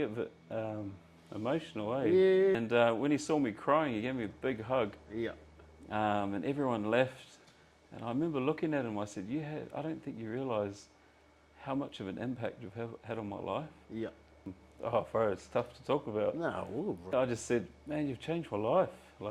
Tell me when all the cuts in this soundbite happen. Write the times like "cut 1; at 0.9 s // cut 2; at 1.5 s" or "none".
cut 1; at 2.5 s // cut 2; at 14.6 s // cut 3; at 17.1 s